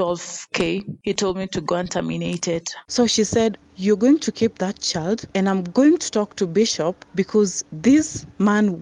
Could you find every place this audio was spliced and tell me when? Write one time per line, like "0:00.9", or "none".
0:02.8
0:05.3
0:07.0